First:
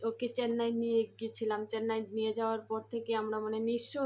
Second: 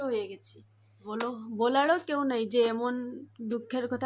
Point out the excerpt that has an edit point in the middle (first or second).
second